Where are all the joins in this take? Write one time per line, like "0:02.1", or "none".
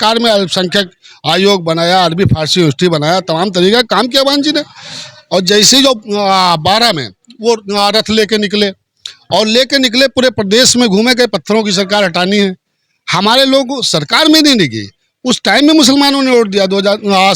none

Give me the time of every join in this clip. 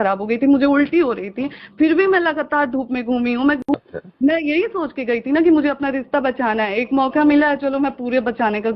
0:03.6

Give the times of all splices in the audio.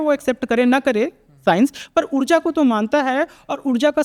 none

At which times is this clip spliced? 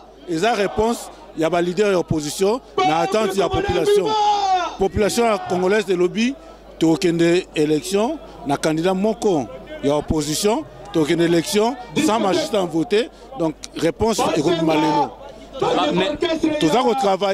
none

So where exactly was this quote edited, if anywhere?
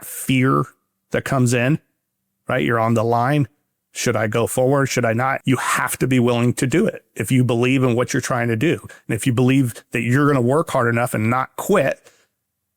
0:05.4

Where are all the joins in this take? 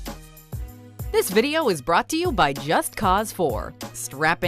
0:00.9

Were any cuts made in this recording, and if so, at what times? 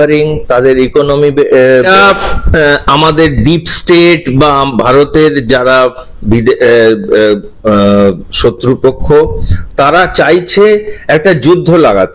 0:01.9

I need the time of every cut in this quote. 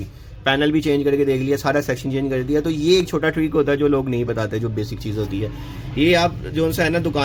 none

